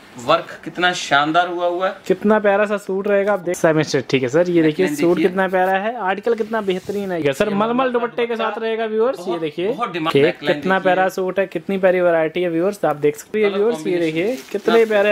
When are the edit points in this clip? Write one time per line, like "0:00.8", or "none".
0:03.5
0:07.2
0:10.1
0:13.3